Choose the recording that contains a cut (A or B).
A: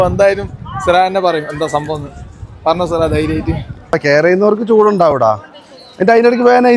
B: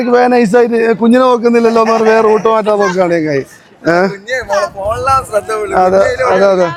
A